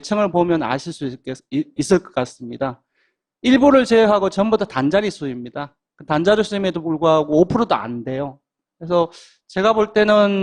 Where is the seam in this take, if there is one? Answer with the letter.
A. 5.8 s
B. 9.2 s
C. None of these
B